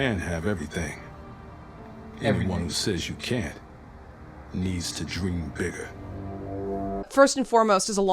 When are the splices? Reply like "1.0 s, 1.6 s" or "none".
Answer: 7.1 s